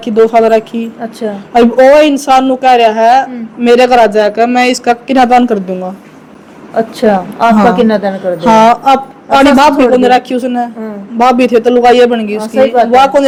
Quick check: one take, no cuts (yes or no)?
yes